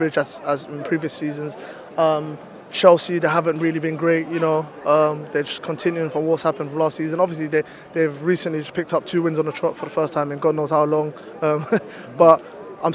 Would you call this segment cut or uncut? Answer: uncut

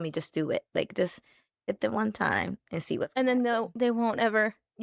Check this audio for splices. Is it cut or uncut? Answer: uncut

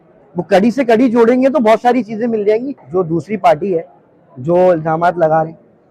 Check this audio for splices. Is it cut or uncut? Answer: cut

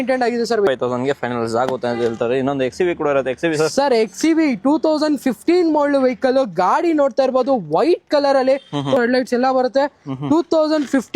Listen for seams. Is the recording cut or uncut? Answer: cut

